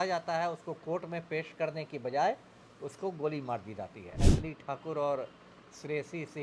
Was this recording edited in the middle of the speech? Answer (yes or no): yes